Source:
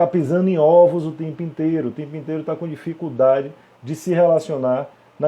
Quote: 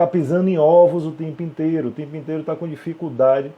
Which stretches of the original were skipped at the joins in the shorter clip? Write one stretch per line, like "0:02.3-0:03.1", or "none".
none